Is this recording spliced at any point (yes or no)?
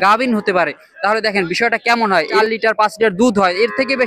yes